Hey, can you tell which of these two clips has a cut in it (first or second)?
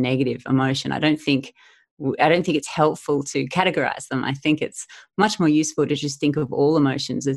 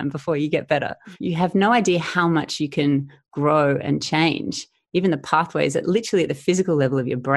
second